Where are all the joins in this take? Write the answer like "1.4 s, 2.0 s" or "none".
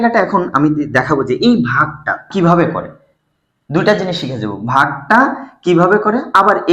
2.3 s